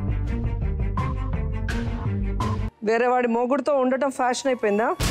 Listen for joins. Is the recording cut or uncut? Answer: cut